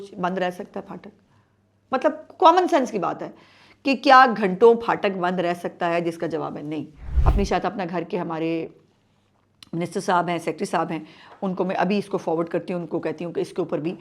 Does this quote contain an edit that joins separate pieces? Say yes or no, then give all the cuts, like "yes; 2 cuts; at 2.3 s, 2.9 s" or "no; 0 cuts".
yes; 1 cut; at 7.0 s